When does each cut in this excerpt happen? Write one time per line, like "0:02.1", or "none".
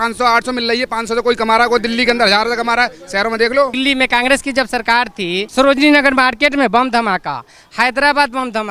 0:03.7
0:05.5